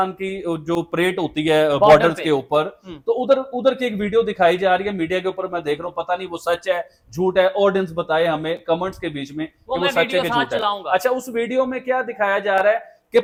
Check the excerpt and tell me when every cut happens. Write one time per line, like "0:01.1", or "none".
none